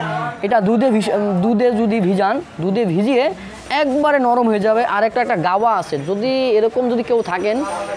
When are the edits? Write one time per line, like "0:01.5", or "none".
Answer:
none